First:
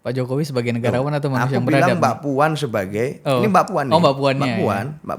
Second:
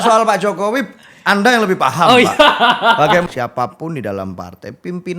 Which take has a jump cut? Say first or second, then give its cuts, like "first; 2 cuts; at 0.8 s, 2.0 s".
second; 1 cut; at 3.2 s